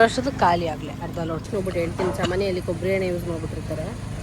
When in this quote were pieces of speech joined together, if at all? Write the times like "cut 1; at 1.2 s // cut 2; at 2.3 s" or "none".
cut 1; at 1.5 s